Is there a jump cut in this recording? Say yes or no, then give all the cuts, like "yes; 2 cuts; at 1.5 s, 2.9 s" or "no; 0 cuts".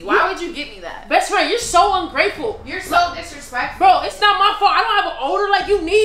no; 0 cuts